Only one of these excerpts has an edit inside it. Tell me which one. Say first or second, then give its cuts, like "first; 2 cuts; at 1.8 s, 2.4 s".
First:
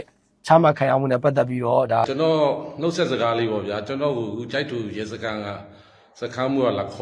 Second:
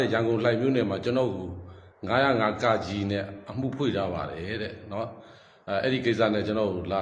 first; 1 cut; at 2.0 s